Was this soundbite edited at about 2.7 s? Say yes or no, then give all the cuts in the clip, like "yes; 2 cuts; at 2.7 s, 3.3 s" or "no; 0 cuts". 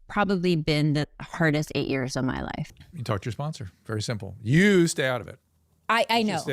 yes; 1 cut; at 2.7 s